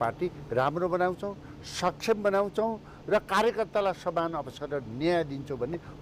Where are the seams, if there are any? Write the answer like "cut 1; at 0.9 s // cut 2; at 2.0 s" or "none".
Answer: none